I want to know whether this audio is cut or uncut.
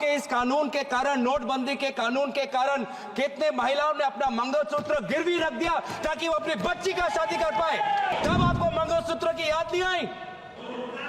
cut